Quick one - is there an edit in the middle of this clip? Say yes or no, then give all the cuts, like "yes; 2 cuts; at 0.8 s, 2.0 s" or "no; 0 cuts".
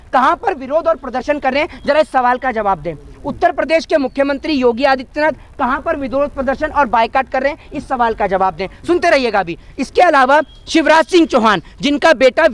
no; 0 cuts